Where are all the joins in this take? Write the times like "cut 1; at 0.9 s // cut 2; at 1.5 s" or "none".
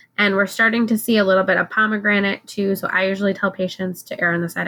none